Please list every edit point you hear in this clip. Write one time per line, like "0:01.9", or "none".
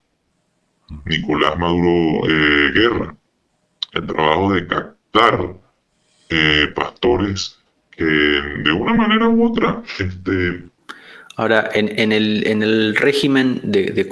0:10.7